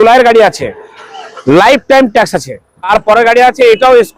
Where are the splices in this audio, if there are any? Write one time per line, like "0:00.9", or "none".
0:02.9